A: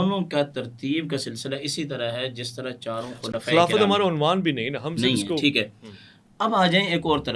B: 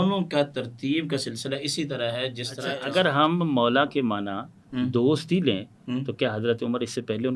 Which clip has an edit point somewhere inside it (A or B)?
B